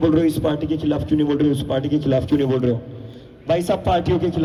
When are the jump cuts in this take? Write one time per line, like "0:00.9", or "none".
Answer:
none